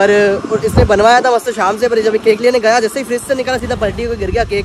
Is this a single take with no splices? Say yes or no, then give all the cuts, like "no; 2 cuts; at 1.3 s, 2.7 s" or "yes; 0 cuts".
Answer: yes; 0 cuts